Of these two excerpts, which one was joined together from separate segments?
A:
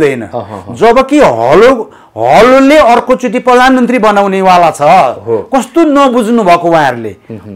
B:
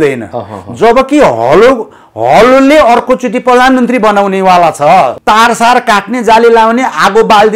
B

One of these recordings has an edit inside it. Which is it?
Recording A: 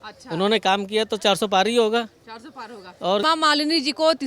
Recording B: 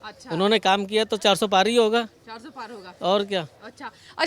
A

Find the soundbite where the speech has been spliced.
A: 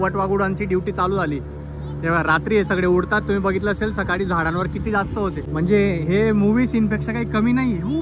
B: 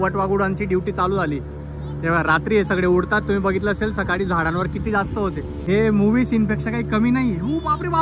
B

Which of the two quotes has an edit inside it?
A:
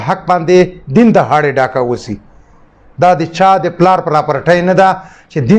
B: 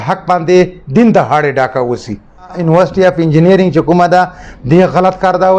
B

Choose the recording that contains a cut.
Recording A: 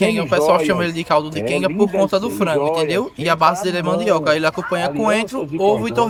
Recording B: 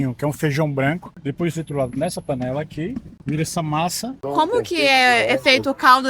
B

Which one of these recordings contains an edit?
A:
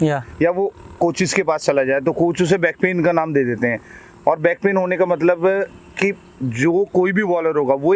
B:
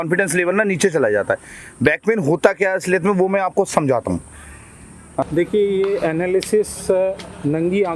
B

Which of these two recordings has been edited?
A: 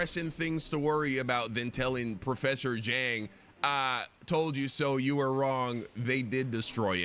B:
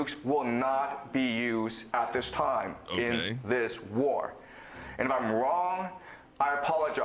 B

